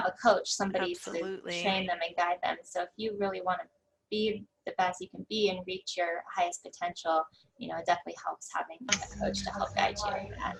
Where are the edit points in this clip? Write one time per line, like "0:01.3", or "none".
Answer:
none